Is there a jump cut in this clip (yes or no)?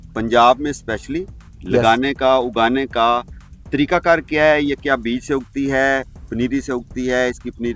no